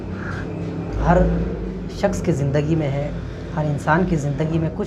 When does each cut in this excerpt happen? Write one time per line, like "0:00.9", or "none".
0:00.9